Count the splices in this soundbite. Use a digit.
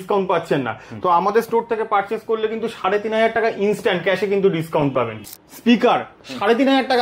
1